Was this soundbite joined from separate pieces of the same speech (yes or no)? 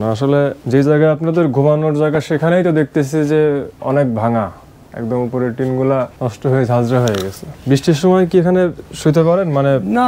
no